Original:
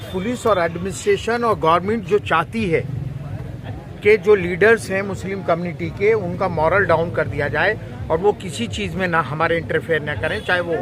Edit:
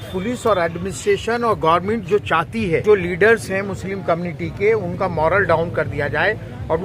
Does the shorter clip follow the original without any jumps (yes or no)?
no